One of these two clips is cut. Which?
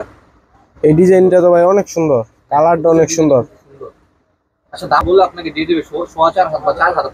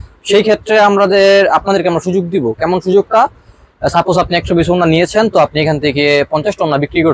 first; 1 cut; at 5.0 s

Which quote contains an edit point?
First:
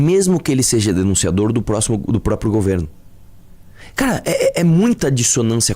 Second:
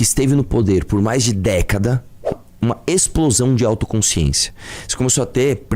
second; 1 cut; at 2.3 s

